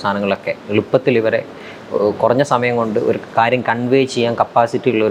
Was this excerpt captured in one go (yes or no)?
yes